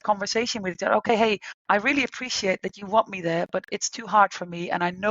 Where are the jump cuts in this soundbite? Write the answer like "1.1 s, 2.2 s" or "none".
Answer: 1.5 s